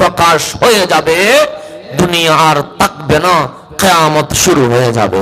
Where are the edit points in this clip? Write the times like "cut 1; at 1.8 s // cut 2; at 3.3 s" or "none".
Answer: none

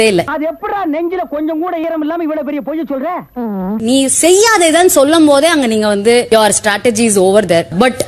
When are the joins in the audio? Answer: cut 1; at 3.8 s

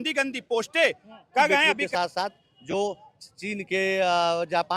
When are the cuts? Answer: cut 1; at 1.8 s

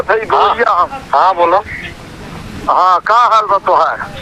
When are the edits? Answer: none

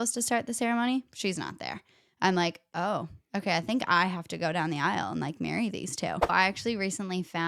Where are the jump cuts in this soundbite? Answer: cut 1; at 6.3 s

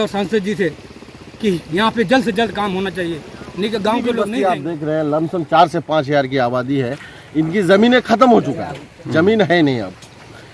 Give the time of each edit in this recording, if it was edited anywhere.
cut 1; at 4.3 s

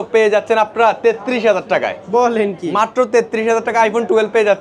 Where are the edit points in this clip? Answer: none

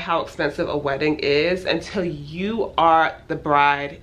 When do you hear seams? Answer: none

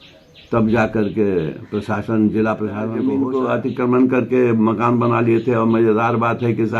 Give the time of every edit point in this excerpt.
cut 1; at 2.9 s

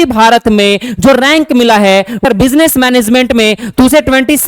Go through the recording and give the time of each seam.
cut 1; at 2.2 s

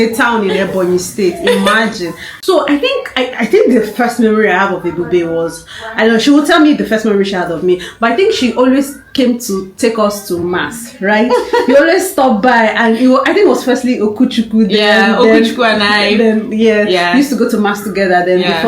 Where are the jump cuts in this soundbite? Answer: cut 1; at 2.3 s

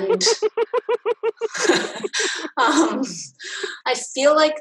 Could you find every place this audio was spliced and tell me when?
cut 1; at 3.7 s

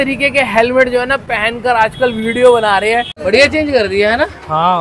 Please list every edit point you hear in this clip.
cut 1; at 3.2 s

